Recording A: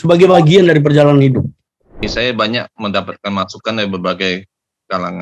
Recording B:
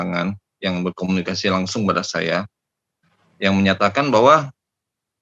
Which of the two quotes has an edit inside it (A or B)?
A